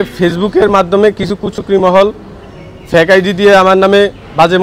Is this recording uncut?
yes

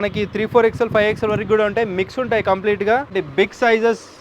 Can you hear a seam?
yes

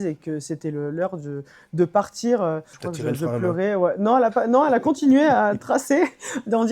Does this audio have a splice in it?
yes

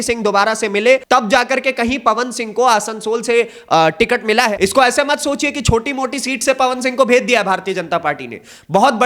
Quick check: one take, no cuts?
no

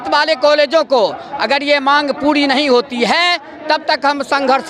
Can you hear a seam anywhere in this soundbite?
no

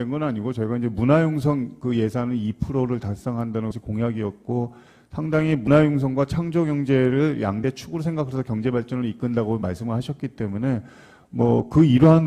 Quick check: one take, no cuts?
yes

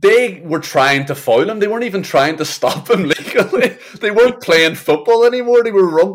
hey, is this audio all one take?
yes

